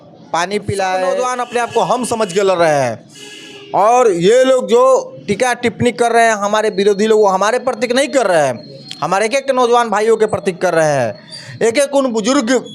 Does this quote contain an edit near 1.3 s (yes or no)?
yes